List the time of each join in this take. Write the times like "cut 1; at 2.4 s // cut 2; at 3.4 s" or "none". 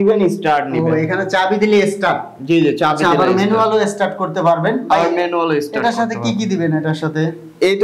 none